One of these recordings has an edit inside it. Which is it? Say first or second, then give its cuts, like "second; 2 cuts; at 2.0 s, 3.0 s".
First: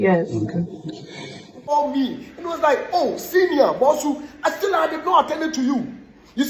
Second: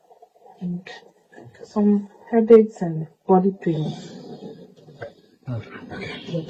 first; 1 cut; at 1.7 s